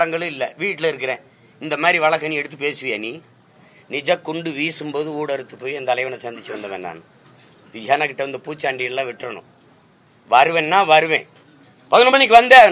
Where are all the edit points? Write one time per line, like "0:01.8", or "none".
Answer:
0:03.7